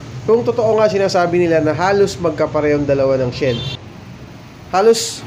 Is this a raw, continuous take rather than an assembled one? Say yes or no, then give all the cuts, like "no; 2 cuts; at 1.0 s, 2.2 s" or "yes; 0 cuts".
no; 1 cut; at 3.7 s